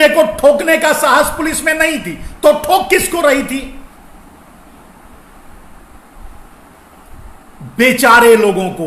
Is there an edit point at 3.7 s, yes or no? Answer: no